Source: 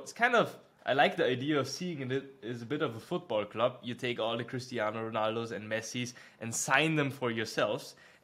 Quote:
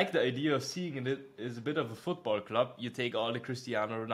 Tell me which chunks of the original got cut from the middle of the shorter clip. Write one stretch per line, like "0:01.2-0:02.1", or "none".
none

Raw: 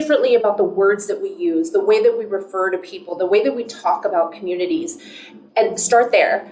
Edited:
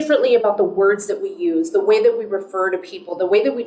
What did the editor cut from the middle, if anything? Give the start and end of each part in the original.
none

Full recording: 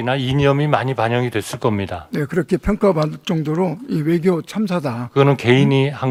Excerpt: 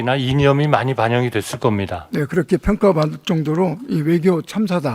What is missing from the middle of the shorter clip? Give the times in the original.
none

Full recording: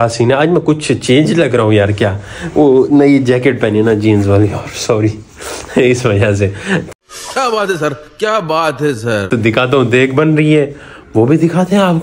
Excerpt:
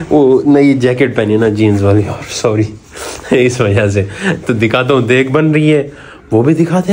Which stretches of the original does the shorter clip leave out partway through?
0:06.9-0:09.2

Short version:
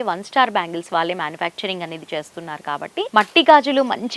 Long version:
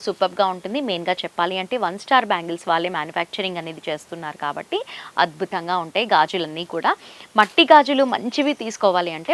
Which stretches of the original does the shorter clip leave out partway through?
0:04.8-0:07.3

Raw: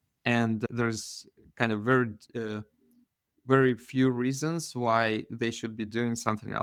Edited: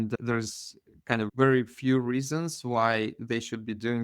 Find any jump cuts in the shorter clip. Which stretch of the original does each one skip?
0:01.8-0:03.4

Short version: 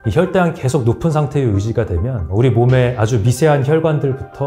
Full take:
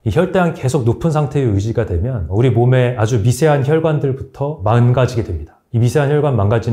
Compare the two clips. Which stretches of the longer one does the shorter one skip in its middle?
none

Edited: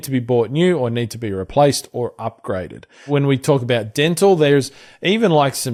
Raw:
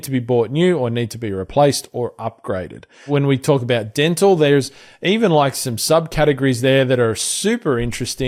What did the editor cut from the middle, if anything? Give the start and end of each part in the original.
none

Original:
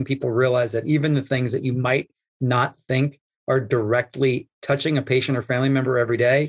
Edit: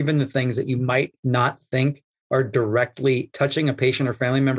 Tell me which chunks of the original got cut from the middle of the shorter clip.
0:02.1-0:02.3
0:04.4-0:04.6

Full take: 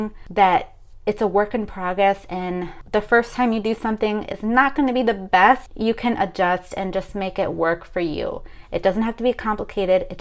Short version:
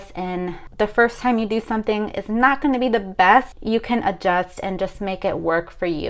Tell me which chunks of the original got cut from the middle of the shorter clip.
none

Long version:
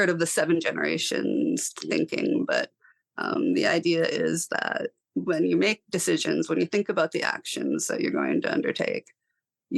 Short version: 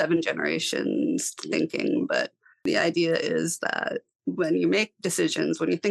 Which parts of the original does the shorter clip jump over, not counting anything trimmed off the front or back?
0:03.0-0:03.5

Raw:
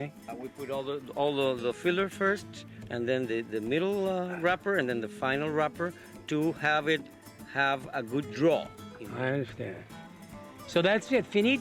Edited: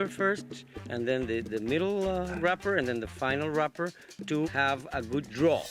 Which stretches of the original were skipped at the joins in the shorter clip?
0:06.5-0:07.5

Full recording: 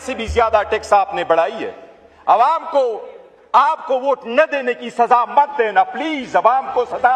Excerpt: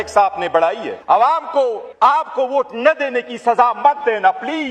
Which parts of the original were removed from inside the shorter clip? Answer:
0:01.7-0:02.1
0:03.0-0:03.4

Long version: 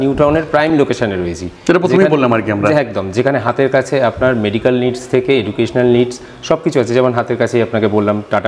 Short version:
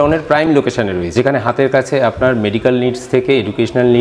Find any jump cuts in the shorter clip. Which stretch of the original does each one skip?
0:01.3-0:03.1

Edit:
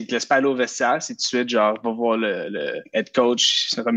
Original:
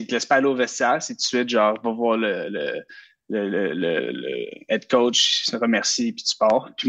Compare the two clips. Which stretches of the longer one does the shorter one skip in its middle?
0:02.8-0:04.6

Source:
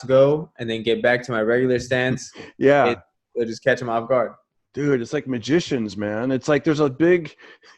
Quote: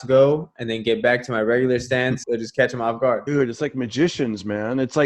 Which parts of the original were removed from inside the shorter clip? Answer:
0:02.2-0:03.3
0:04.3-0:04.8

